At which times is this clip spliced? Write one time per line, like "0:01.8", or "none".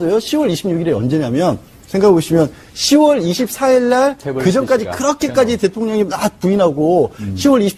0:02.6